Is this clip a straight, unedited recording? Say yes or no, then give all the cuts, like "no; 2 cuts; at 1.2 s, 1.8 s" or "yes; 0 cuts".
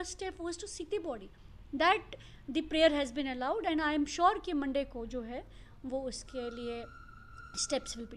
yes; 0 cuts